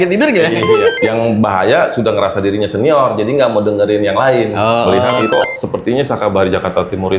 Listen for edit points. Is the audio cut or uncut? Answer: cut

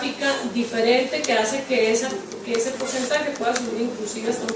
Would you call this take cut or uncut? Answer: cut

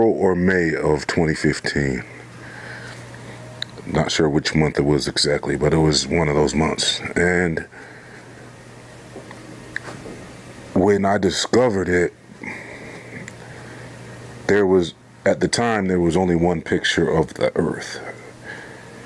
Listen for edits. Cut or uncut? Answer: cut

